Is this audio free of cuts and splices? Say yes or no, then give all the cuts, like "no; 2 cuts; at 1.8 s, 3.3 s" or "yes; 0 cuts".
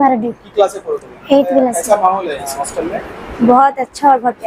no; 1 cut; at 1.8 s